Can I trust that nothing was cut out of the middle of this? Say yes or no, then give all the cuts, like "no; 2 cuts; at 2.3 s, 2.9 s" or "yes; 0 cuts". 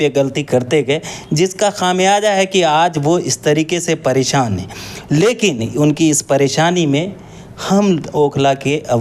yes; 0 cuts